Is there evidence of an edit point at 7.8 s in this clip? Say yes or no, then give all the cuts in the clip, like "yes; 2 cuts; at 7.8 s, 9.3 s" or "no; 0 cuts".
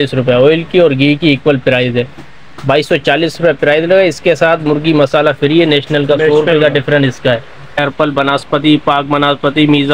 yes; 1 cut; at 7.8 s